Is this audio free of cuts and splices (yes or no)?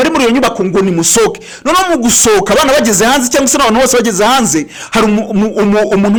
yes